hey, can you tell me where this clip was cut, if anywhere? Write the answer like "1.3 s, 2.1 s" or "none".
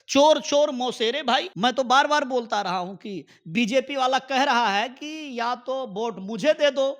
1.5 s